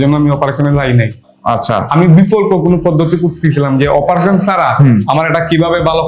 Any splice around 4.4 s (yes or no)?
no